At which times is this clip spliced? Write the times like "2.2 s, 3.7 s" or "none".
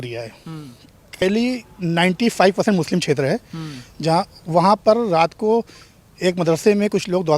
1.2 s